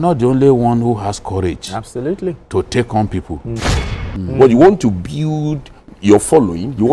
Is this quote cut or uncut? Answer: cut